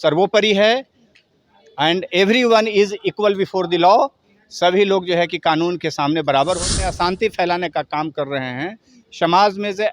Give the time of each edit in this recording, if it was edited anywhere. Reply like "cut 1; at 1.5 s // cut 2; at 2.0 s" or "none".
cut 1; at 6.7 s